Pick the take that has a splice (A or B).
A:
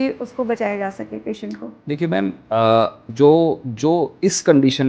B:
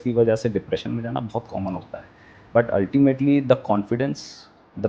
A